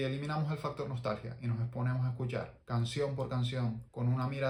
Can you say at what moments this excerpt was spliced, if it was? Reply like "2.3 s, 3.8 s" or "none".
none